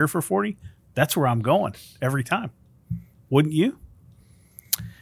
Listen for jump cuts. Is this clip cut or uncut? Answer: uncut